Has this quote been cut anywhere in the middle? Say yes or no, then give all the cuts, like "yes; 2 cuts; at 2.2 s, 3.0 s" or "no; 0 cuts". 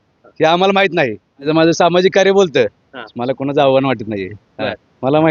yes; 1 cut; at 1.5 s